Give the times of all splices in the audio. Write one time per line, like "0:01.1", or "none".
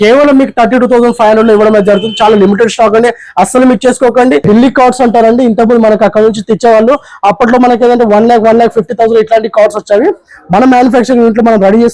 0:04.4